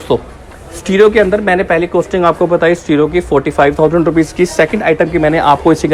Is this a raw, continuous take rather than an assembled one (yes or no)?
yes